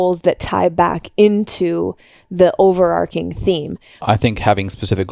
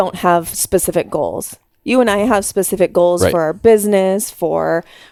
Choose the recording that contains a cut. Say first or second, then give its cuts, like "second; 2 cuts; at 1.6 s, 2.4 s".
first; 1 cut; at 4.1 s